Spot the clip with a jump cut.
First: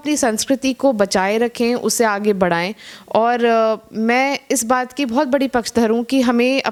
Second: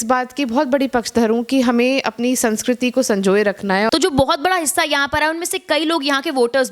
second; 1 cut; at 3.9 s

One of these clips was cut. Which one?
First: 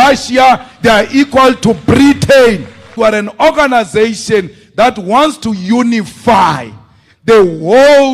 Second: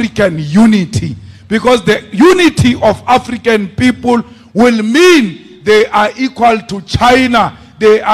first; 1 cut; at 2.9 s

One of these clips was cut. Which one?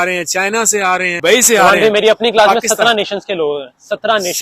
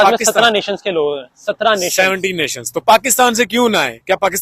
first; 1 cut; at 1.2 s

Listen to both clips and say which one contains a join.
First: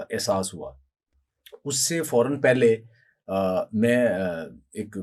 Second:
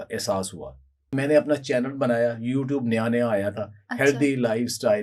second; 1 cut; at 1.1 s

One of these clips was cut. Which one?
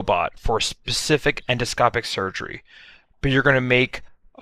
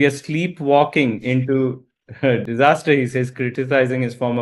second; 1 cut; at 2.5 s

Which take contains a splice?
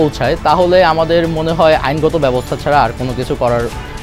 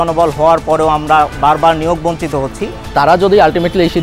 second; 1 cut; at 2.8 s

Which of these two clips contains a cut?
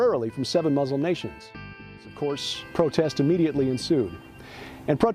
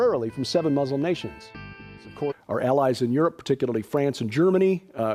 first; 1 cut; at 2.3 s

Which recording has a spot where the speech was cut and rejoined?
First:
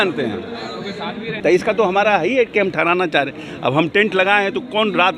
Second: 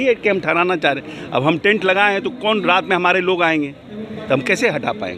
first; 1 cut; at 1.4 s

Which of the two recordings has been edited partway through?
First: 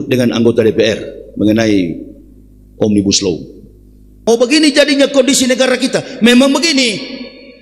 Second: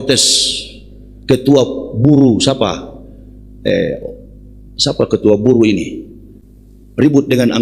first; 1 cut; at 4.1 s

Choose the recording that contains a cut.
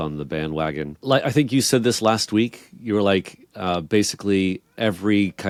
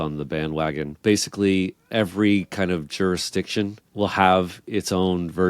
second; 2 cuts; at 1.0 s, 3.8 s

